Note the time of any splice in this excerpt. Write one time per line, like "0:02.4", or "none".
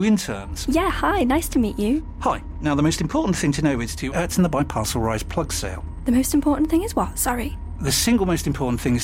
none